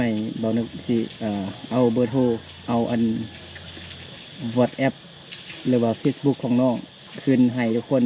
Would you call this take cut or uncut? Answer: uncut